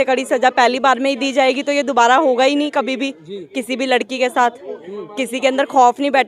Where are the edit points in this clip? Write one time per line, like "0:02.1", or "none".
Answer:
none

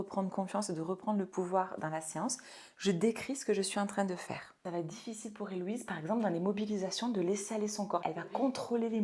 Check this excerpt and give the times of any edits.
0:04.6
0:08.0

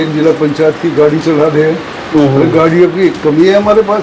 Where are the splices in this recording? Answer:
none

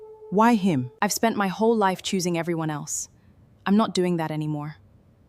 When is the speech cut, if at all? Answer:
0:00.9

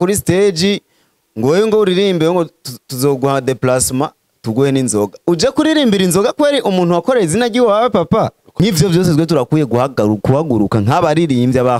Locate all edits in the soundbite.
0:08.4

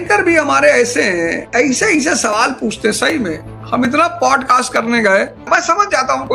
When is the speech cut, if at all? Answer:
0:01.4
0:05.4

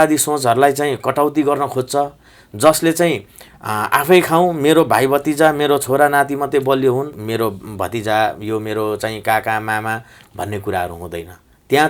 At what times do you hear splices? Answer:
0:07.2

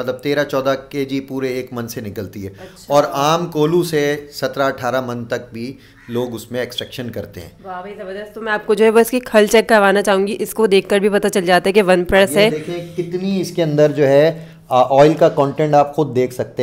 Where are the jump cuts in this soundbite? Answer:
none

